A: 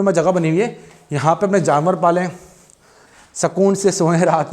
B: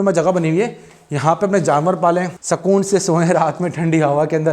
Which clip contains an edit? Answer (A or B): B